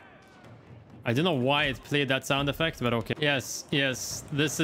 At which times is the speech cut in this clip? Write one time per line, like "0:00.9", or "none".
0:03.1